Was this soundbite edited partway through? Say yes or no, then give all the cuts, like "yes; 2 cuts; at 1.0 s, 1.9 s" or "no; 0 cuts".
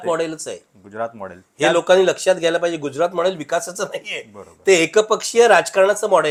no; 0 cuts